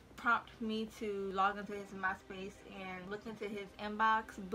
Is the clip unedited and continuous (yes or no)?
yes